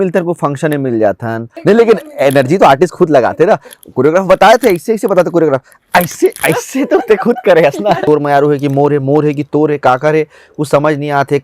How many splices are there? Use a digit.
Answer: 2